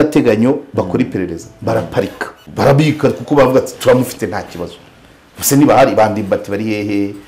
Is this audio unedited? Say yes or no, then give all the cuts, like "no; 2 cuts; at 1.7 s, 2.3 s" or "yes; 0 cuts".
no; 1 cut; at 2.4 s